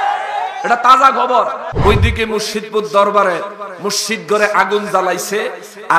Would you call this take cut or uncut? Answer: cut